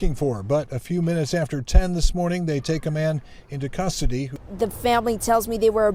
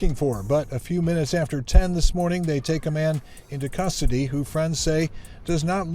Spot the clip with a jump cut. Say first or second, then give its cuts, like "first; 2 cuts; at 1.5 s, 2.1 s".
first; 1 cut; at 4.3 s